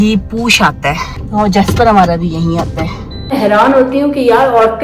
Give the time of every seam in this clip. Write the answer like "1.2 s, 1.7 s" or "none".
1.1 s, 3.3 s